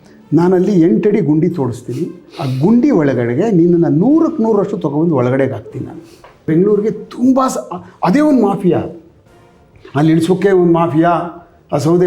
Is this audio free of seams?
no; 1 cut; at 6.5 s

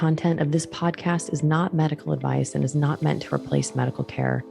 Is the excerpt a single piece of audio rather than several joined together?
yes; 0 cuts

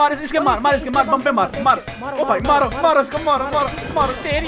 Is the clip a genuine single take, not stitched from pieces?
yes; 0 cuts

